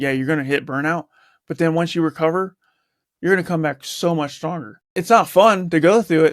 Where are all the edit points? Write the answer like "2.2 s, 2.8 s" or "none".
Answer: 4.9 s